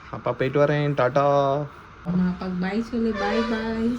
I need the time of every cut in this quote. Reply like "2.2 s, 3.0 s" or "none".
2.1 s